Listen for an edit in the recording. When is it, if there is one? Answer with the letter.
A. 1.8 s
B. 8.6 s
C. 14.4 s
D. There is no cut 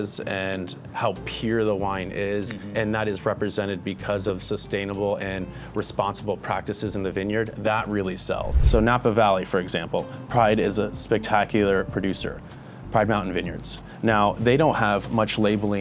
B